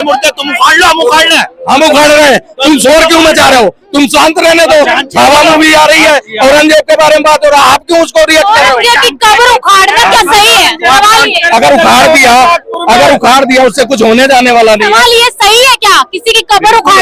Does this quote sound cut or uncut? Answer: uncut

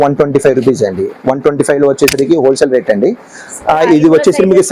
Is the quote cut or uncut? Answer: uncut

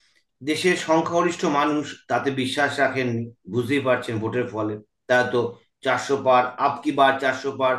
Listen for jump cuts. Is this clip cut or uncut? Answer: uncut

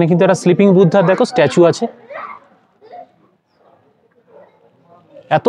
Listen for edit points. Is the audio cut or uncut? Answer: uncut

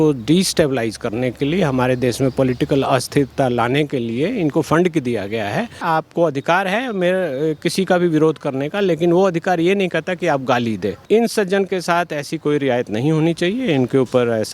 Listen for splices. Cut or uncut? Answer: cut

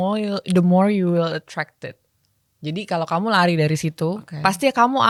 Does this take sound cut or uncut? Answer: uncut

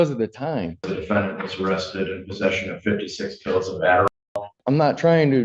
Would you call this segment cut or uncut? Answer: cut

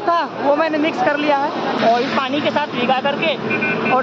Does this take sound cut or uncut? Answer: cut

